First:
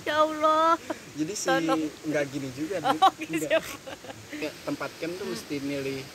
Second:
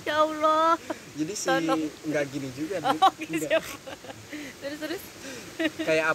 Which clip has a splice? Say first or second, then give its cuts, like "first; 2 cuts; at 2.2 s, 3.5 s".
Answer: first; 1 cut; at 4.4 s